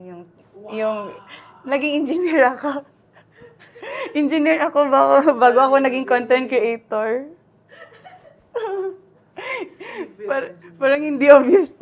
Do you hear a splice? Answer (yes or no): no